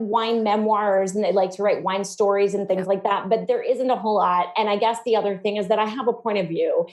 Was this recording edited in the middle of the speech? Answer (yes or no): no